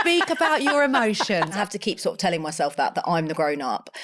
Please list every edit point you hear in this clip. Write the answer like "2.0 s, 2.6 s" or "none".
1.6 s